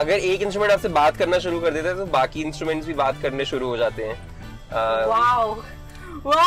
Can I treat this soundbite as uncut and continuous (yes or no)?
yes